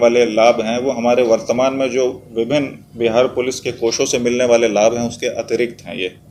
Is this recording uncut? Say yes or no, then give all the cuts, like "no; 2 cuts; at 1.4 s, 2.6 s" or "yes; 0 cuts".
yes; 0 cuts